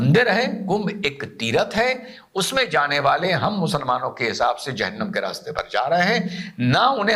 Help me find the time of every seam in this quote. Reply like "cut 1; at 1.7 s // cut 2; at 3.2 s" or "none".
none